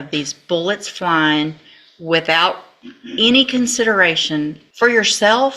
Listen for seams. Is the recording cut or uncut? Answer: cut